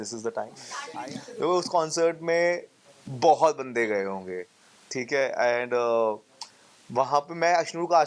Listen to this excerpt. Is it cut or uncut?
cut